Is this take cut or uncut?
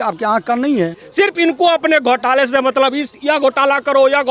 cut